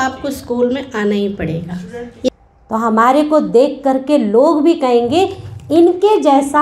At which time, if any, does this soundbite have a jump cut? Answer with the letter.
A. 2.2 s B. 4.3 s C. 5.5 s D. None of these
A